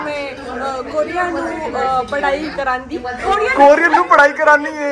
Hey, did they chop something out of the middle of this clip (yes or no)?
no